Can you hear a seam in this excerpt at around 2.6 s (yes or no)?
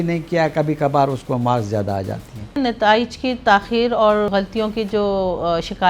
yes